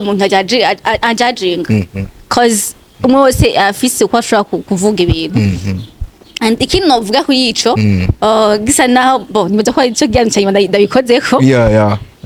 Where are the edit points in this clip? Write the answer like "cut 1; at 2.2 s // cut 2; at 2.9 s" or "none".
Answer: none